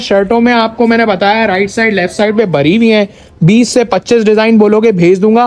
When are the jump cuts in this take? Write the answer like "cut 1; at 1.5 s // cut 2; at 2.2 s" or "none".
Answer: none